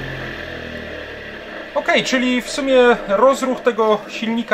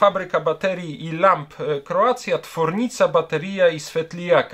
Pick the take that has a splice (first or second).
first